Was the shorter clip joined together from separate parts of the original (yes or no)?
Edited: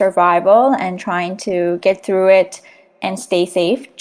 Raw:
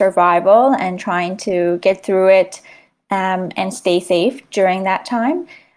yes